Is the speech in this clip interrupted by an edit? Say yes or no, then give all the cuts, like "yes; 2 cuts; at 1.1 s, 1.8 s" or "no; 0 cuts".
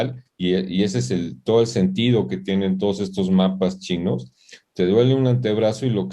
no; 0 cuts